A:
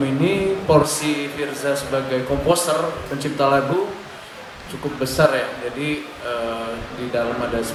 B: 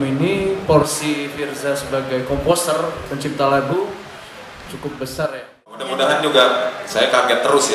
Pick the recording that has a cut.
B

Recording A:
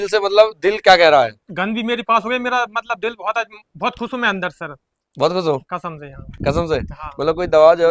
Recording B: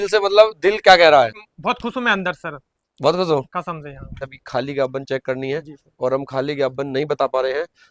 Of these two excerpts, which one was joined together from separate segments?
B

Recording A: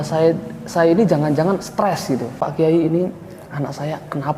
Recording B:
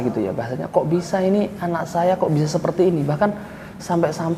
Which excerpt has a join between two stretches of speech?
A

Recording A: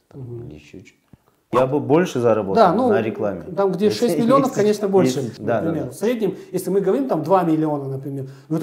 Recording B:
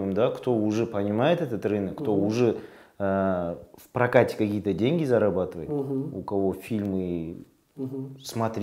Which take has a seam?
A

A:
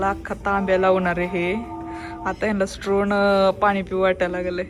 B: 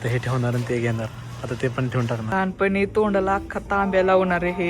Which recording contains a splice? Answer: B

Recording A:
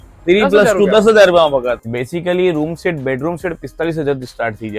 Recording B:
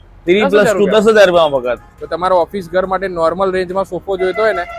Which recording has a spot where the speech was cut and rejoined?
A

